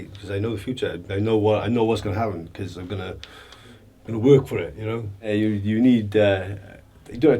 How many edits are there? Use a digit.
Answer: 1